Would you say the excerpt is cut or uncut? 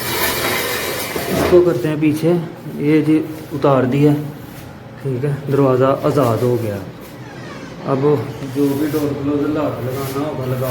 uncut